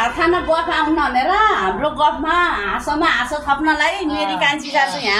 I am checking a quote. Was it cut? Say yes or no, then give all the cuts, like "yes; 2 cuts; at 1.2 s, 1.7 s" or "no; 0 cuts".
no; 0 cuts